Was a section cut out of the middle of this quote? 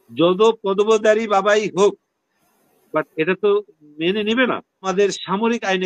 yes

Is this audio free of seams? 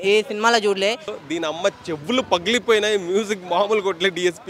no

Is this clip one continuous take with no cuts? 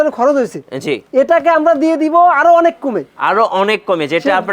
no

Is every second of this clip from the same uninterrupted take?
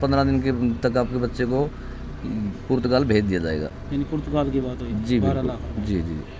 yes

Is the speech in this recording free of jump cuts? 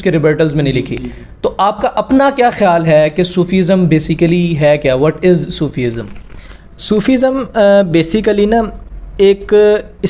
yes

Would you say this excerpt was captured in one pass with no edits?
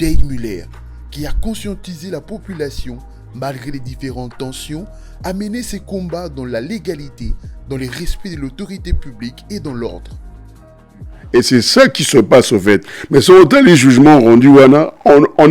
no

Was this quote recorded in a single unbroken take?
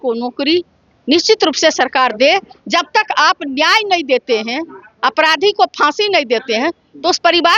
yes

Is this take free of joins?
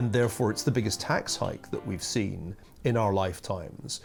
yes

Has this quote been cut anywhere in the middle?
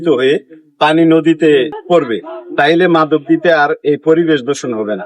yes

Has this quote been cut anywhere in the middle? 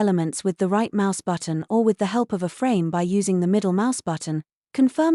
no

